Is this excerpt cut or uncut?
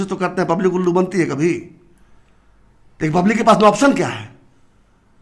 uncut